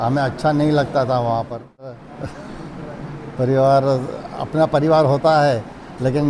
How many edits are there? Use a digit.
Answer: 1